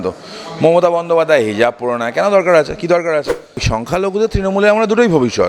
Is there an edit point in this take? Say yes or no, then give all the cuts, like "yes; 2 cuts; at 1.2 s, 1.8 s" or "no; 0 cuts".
yes; 1 cut; at 3.7 s